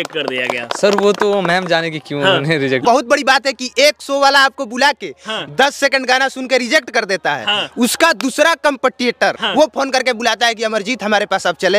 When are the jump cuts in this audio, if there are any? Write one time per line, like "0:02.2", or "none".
0:02.8
0:09.4